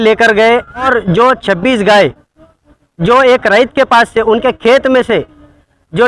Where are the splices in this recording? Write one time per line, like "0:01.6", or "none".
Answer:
0:00.9